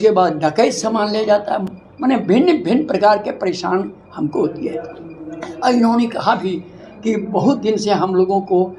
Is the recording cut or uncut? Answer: uncut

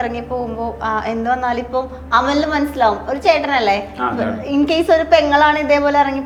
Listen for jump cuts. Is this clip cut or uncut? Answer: uncut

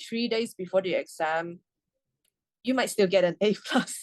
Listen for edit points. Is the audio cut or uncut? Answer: uncut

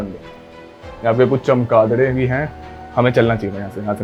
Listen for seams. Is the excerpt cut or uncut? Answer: uncut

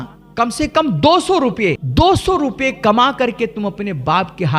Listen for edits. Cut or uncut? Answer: cut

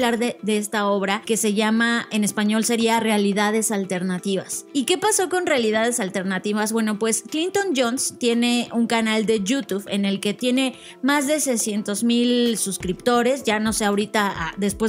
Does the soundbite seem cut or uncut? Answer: cut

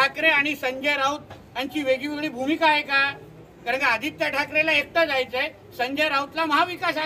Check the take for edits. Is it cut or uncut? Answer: uncut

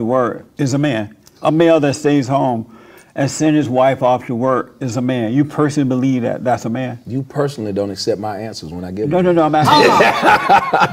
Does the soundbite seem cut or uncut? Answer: uncut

